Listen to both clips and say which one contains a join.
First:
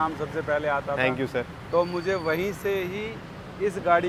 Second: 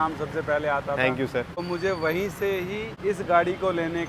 second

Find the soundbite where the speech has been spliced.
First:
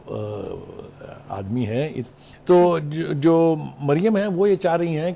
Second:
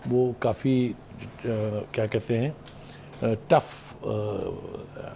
first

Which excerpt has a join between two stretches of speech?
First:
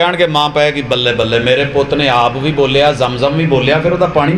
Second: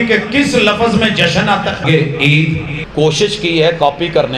second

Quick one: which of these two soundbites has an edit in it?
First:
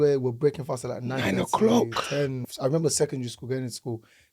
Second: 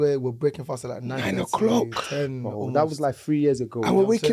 first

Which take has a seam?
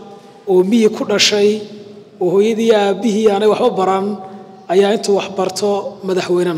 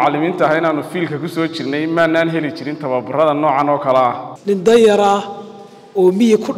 second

